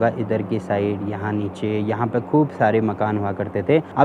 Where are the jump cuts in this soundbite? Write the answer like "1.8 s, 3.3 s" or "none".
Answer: none